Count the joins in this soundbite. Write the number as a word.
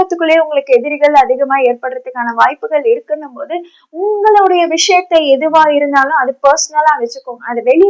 zero